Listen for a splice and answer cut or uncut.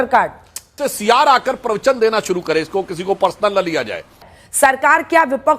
cut